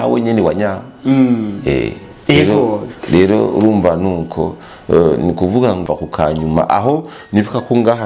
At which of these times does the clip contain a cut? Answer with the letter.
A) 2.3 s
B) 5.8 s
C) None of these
B